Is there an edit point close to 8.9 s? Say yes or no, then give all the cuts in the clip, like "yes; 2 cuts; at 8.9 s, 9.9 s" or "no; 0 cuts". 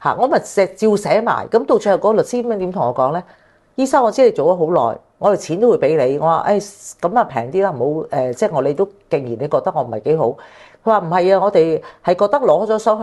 no; 0 cuts